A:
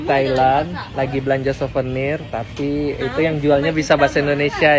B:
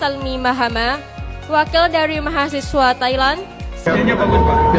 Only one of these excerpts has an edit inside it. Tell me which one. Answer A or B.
B